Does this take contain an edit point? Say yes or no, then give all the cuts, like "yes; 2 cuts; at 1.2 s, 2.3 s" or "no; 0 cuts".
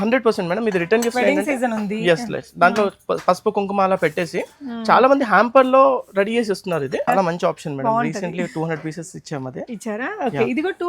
yes; 1 cut; at 7.0 s